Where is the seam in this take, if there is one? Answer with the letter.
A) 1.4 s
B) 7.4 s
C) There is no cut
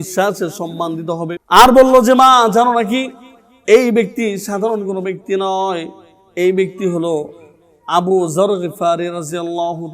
A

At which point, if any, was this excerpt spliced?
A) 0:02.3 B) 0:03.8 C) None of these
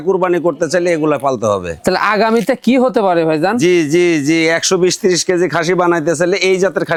C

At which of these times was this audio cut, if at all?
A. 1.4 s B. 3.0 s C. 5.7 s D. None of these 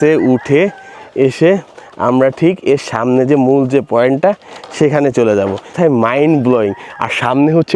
C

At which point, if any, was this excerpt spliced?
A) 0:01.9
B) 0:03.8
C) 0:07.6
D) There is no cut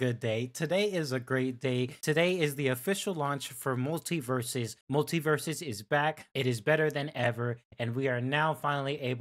A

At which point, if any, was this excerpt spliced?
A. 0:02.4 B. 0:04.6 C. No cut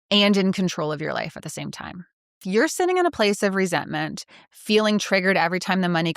A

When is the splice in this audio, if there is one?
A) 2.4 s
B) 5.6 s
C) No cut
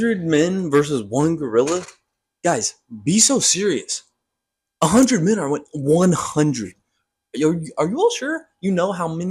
C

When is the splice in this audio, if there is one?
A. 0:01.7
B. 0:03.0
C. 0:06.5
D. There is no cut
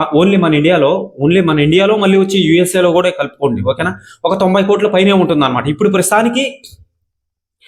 D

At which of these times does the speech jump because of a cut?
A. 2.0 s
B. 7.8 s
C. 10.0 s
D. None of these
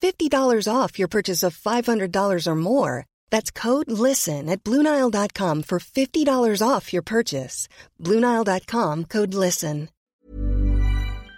C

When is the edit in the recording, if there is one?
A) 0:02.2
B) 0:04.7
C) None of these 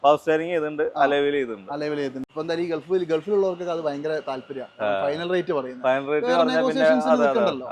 A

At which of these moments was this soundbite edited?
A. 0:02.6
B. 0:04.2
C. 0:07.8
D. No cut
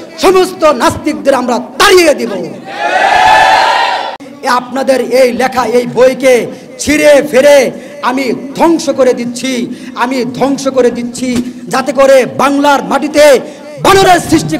B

